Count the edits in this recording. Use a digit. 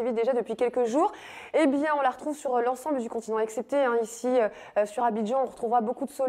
1